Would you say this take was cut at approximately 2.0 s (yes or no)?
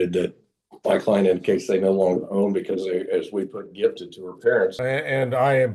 no